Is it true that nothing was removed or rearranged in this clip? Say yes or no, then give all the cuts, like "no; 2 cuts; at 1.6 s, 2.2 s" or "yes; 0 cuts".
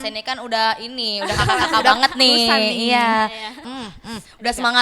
no; 1 cut; at 3.5 s